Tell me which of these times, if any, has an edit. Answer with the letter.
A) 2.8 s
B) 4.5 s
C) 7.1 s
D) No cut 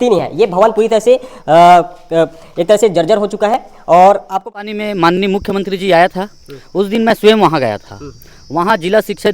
B